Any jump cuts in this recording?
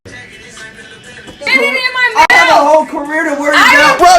yes; 1 cut; at 1.5 s

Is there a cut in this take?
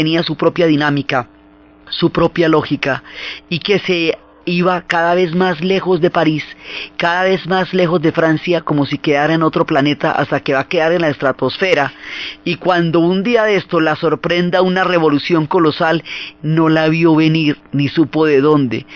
no; 0 cuts

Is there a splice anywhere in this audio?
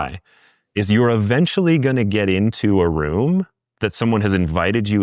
no; 0 cuts

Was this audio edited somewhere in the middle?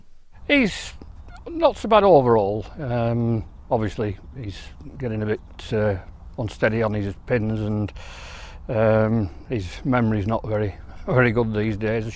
yes; 1 cut; at 4.7 s

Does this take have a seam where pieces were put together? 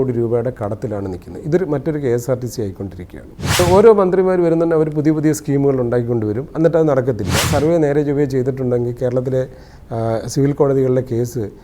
yes; 2 cuts; at 3.6 s, 7.5 s

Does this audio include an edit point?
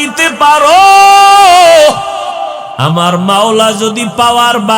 no; 0 cuts

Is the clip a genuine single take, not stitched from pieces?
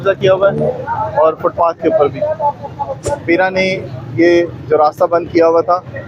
no; 1 cut; at 3.0 s

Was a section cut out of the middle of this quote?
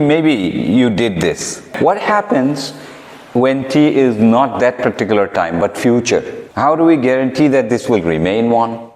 yes; 2 cuts; at 1.7 s, 6.4 s

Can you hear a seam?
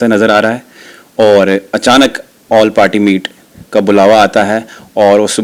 no; 0 cuts

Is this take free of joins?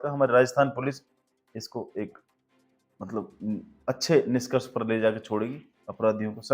yes; 0 cuts

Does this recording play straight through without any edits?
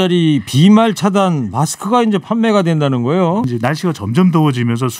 no; 1 cut; at 3.5 s

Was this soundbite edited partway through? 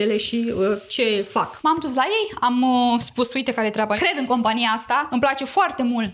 yes; 2 cuts; at 1.5 s, 5.1 s

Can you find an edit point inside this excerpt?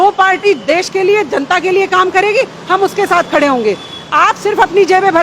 no; 0 cuts

